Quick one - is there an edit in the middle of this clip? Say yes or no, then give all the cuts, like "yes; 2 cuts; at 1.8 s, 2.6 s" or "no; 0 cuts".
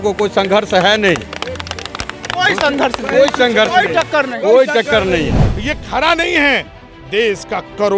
yes; 1 cut; at 5.5 s